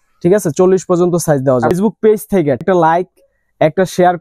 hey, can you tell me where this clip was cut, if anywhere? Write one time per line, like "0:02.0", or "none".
0:01.7
0:02.6